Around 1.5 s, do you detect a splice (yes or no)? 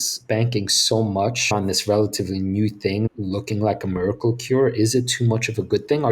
yes